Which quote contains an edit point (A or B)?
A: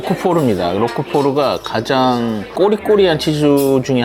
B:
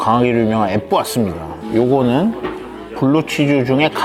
A